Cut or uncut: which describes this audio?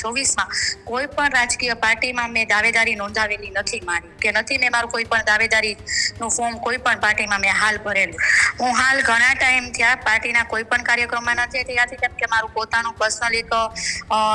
cut